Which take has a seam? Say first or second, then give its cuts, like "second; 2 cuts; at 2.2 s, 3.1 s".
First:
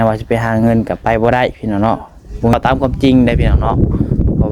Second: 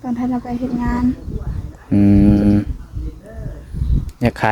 first; 1 cut; at 2.5 s